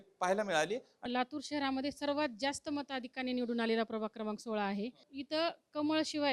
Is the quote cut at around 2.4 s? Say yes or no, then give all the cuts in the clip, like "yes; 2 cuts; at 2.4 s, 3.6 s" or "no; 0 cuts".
no; 2 cuts; at 0.9 s, 5.1 s